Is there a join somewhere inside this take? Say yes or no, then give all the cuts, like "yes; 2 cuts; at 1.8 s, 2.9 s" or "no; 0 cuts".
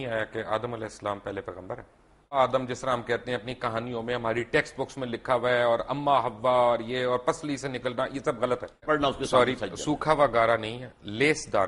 yes; 2 cuts; at 2.3 s, 8.8 s